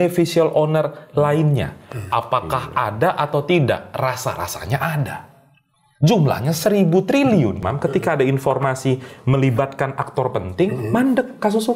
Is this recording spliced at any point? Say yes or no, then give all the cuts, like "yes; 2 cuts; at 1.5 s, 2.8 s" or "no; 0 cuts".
yes; 1 cut; at 7.6 s